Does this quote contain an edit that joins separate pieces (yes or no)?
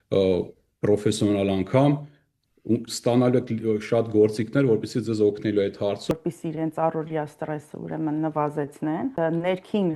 yes